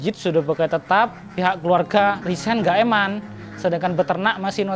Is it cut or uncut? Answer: cut